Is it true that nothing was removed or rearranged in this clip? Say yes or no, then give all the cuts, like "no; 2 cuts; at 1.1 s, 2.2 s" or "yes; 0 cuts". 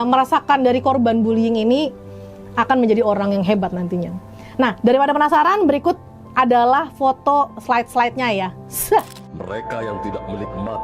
yes; 0 cuts